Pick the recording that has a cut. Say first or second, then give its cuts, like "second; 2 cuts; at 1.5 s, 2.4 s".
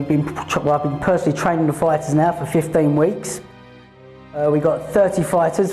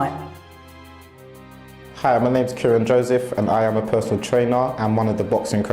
second; 1 cut; at 4.1 s